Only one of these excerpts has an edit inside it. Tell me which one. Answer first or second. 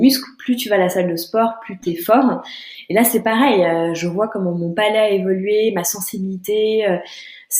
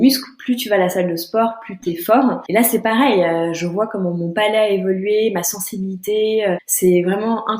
second